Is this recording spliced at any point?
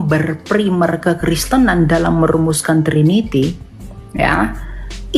no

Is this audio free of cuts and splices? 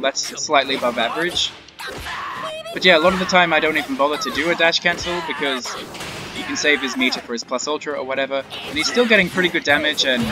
yes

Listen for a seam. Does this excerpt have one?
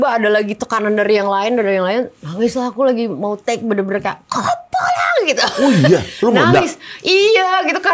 no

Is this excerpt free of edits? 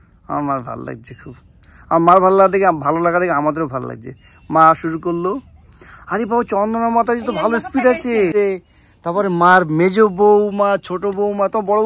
no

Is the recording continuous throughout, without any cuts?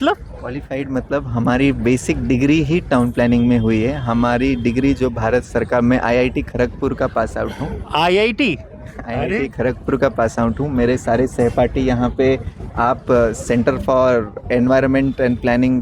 yes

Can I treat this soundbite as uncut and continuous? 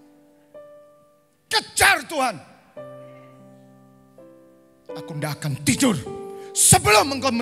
yes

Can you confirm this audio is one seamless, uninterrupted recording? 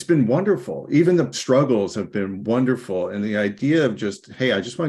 yes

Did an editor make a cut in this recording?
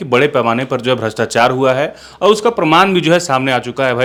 no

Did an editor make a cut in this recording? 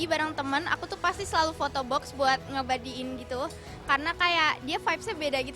no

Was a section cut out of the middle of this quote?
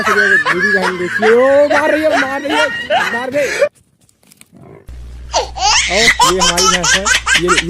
yes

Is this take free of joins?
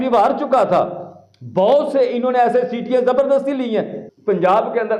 no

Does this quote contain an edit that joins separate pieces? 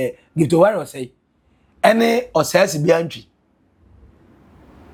no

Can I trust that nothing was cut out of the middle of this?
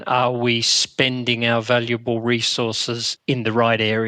no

